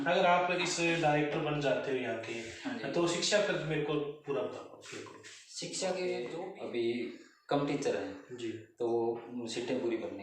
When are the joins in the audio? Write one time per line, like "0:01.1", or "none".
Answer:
0:06.5